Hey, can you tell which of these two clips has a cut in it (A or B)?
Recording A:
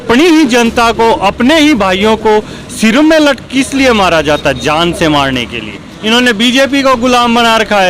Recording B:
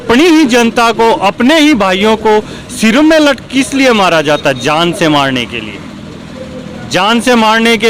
A